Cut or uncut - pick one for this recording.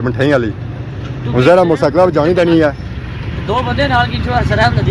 uncut